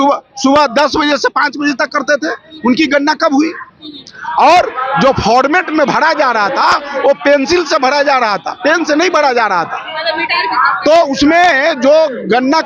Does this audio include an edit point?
no; 0 cuts

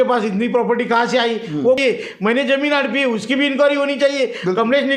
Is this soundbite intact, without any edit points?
no; 1 cut; at 1.8 s

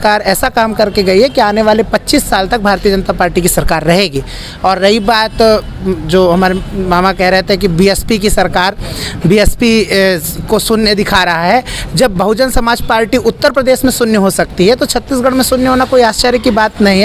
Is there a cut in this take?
no; 0 cuts

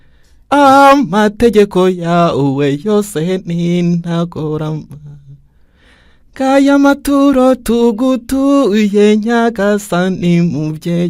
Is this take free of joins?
yes; 0 cuts

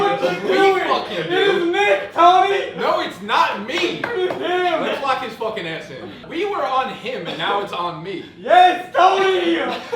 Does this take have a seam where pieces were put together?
yes; 1 cut; at 6.2 s

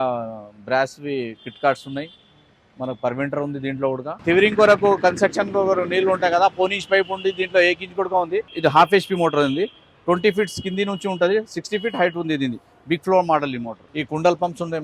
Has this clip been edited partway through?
yes; 3 cuts; at 4.2 s, 8.4 s, 13.8 s

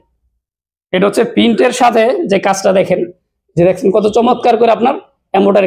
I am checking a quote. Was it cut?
no; 0 cuts

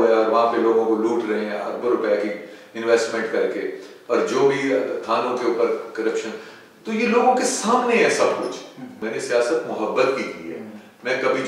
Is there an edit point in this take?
yes; 1 cut; at 9.0 s

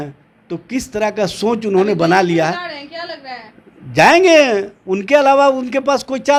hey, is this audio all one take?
yes; 0 cuts

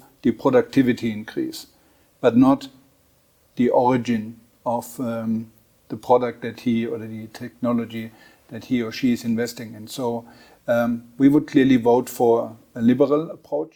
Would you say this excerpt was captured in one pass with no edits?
yes; 0 cuts

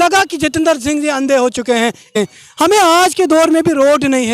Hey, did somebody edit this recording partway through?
yes; 1 cut; at 2.1 s

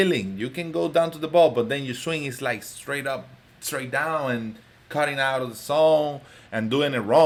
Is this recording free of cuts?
yes; 0 cuts

